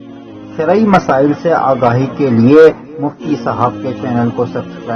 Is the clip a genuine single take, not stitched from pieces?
yes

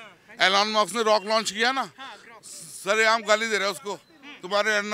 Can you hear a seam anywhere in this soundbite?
no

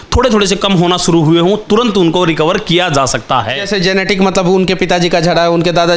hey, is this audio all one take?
no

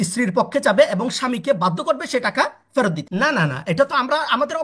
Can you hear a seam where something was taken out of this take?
yes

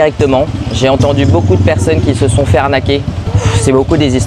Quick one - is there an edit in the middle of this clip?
yes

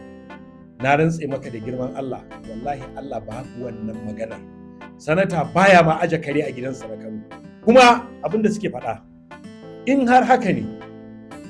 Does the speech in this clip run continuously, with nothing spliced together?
no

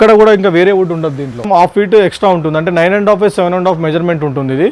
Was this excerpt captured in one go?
no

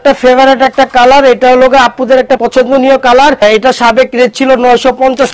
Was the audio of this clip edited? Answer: yes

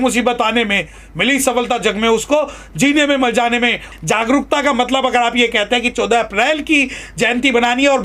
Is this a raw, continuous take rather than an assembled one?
no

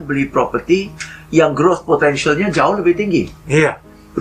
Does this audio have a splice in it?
no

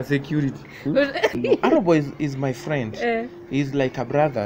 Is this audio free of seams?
no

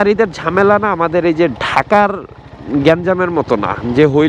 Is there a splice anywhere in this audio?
no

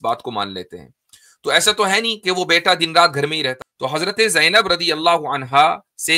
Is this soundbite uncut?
no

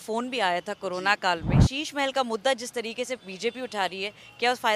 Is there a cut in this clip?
yes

